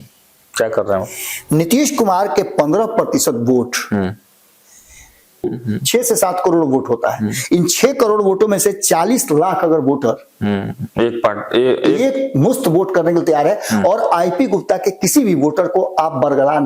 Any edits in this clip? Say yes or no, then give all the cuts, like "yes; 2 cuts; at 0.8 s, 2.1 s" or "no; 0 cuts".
yes; 1 cut; at 5.5 s